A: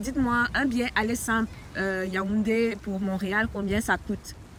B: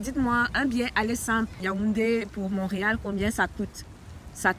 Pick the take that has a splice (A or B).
B